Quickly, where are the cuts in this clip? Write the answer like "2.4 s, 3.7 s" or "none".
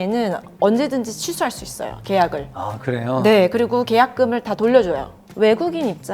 5.2 s